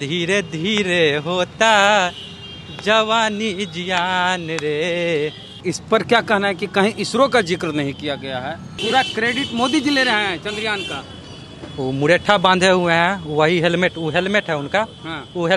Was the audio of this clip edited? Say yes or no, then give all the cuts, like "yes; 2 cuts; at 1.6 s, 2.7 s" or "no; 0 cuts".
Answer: yes; 3 cuts; at 5.5 s, 8.7 s, 11.0 s